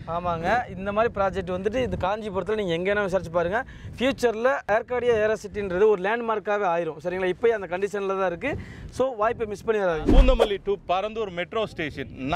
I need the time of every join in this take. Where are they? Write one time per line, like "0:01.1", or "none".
0:10.0